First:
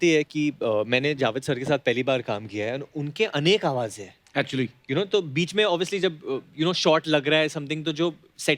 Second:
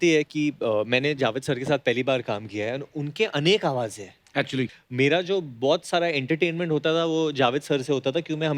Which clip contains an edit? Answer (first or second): second